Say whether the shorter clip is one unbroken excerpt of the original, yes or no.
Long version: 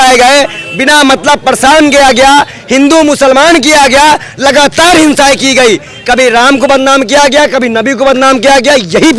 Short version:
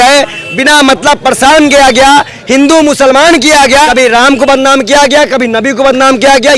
no